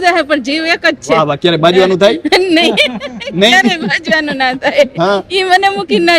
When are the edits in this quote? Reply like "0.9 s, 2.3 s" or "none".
none